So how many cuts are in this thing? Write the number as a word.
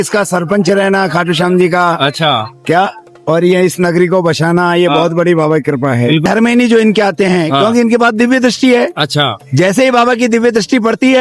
one